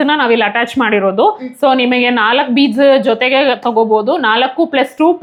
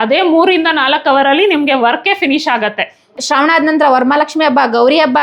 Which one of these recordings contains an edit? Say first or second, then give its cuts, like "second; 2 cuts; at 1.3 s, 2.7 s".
second; 1 cut; at 3.0 s